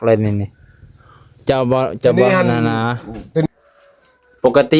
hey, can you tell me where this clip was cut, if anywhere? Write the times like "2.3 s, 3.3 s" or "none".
3.4 s